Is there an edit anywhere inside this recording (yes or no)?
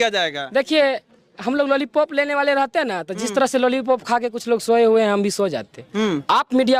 no